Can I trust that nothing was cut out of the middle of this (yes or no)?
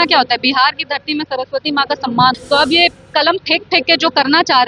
no